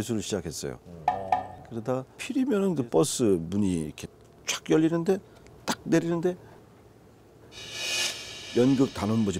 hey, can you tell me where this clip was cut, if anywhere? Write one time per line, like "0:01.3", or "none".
0:02.2